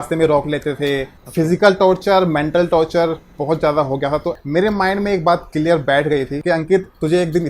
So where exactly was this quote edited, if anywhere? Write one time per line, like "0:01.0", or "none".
0:01.2
0:04.4
0:06.4